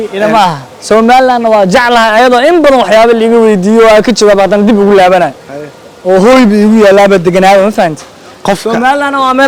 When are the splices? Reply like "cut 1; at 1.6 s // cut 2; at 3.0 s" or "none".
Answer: none